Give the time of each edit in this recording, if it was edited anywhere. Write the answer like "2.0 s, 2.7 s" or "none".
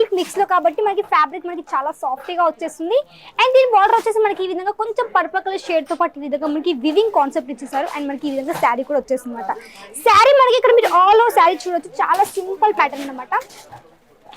none